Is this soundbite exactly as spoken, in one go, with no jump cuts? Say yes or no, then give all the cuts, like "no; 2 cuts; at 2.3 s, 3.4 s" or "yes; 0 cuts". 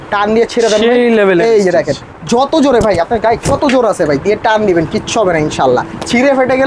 yes; 0 cuts